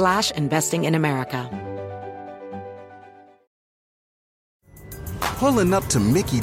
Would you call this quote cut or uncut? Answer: cut